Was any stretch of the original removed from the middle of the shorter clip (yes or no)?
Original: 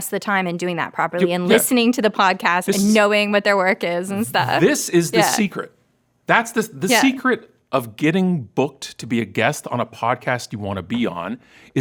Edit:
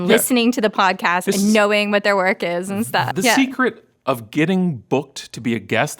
yes